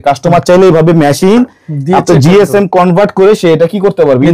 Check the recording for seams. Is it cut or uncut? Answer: uncut